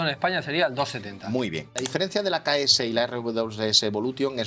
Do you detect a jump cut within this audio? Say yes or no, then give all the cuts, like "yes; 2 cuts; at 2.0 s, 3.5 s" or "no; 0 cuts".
yes; 1 cut; at 1.8 s